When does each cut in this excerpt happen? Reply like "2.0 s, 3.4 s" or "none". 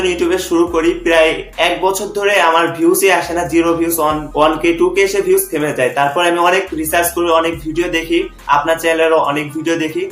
4.2 s